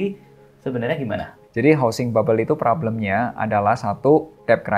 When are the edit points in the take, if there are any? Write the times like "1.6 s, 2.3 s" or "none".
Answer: 1.4 s